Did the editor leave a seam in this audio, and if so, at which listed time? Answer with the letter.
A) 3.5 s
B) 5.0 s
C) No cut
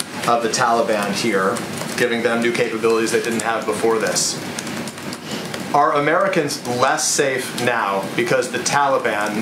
C